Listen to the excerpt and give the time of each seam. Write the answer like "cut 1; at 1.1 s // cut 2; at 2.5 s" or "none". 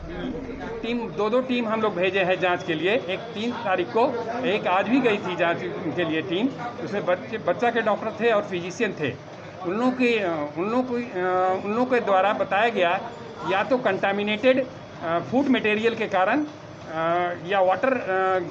none